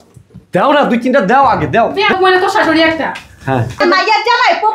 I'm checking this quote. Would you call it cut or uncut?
cut